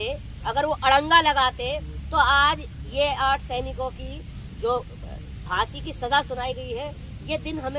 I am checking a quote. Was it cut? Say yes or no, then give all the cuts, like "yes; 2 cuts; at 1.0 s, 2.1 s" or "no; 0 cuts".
no; 0 cuts